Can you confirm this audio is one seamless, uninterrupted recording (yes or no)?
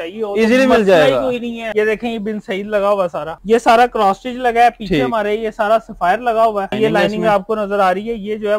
no